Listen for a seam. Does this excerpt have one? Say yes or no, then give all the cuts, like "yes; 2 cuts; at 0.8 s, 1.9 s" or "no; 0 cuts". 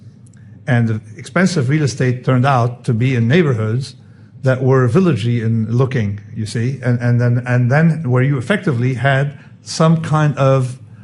no; 0 cuts